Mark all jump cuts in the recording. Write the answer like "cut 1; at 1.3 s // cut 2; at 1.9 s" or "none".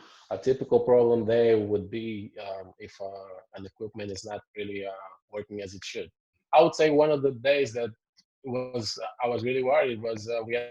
cut 1; at 6.3 s